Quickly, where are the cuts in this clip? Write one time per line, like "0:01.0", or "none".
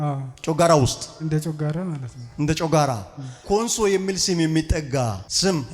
0:03.4